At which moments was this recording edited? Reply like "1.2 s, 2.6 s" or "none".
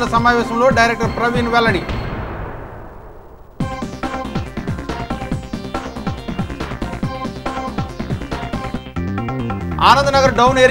9.8 s

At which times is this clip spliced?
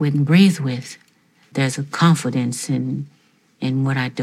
1.4 s

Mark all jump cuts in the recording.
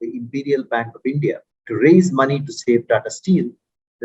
1.5 s

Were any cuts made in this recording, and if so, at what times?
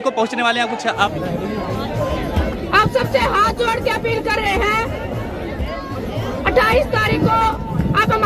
1.1 s

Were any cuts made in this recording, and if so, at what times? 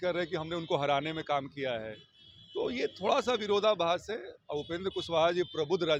none

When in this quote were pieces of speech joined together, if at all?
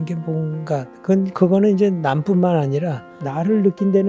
none

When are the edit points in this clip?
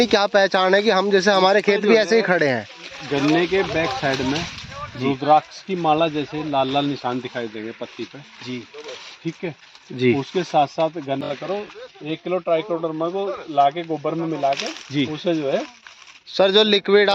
11.3 s

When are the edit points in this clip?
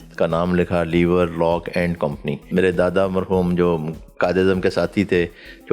2.5 s

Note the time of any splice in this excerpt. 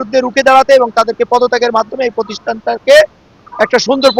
none

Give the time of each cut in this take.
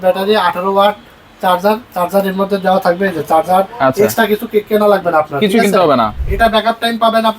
6.2 s

